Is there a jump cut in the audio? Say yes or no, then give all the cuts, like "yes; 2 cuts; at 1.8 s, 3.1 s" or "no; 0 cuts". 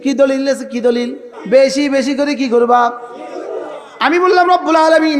yes; 1 cut; at 1.3 s